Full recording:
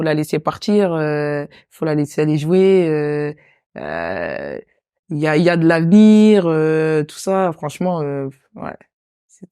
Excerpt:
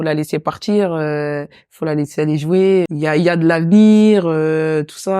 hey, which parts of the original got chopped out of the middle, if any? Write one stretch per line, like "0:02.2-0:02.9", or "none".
0:02.9-0:05.1